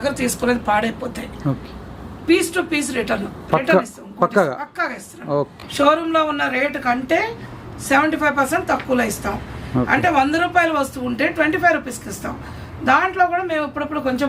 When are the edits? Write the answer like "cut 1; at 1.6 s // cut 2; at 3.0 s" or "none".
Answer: cut 1; at 5.6 s